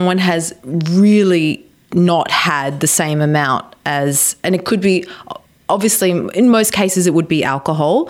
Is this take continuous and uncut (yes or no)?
yes